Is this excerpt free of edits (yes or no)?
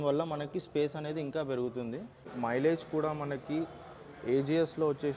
no